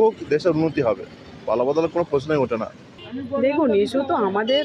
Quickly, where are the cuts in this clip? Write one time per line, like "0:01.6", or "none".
0:03.0